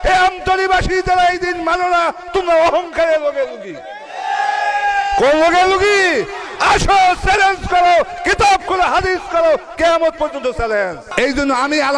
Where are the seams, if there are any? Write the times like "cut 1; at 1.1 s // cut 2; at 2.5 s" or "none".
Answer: cut 1; at 11.0 s